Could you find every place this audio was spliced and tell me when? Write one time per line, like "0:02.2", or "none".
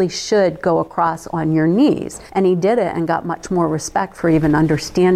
0:02.2